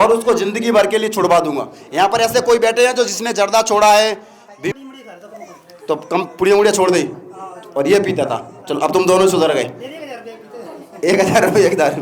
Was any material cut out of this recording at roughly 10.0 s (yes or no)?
no